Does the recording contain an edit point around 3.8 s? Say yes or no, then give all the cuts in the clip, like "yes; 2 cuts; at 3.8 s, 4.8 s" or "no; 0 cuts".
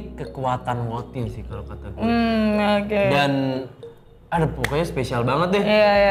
no; 0 cuts